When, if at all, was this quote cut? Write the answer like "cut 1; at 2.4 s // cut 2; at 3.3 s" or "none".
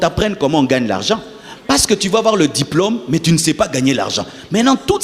none